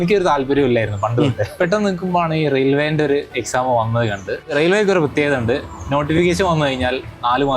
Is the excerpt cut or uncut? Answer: cut